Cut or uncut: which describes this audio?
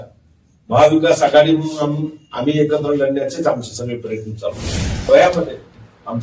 cut